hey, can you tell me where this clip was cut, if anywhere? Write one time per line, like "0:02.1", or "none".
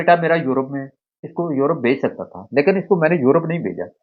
0:01.2